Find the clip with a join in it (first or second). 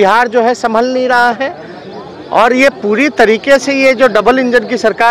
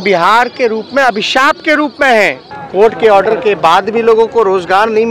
second